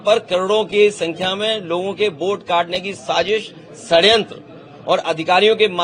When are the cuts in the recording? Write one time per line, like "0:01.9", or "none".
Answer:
none